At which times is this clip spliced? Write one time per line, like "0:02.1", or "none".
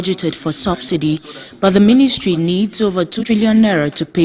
0:03.2